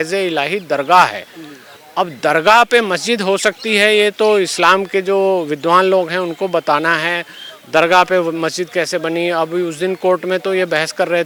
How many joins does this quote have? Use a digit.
0